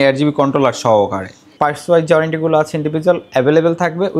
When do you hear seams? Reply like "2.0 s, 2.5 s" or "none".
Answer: 1.5 s